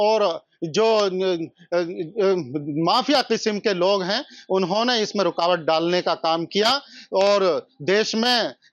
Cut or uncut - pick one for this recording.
uncut